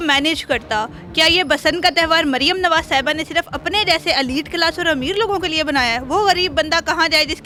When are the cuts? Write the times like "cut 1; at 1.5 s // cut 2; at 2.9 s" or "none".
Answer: none